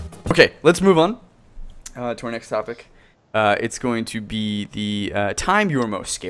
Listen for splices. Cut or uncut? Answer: uncut